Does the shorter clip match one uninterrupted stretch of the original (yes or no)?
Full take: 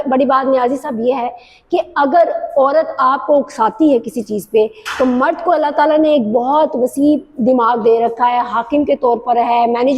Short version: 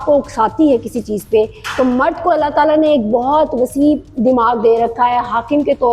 yes